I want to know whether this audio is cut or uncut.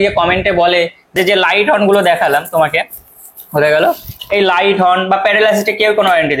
cut